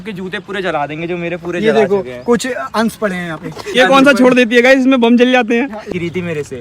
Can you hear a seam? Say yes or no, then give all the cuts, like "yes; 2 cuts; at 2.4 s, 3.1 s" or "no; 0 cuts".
yes; 2 cuts; at 3.8 s, 5.9 s